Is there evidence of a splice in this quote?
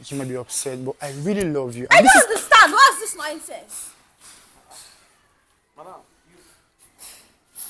no; 0 cuts

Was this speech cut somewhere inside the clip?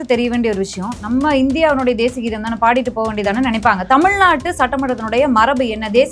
yes; 1 cut; at 0.9 s

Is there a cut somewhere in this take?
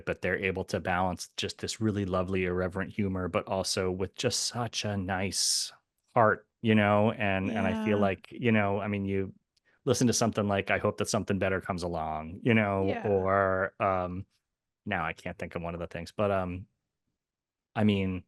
no; 0 cuts

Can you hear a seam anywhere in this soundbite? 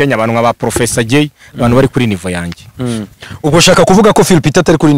no; 0 cuts

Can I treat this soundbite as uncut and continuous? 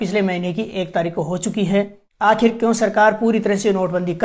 no; 1 cut; at 2.0 s

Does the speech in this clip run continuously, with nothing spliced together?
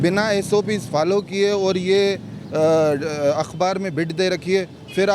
yes; 0 cuts

